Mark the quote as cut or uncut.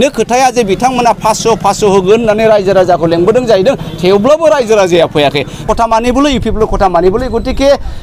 cut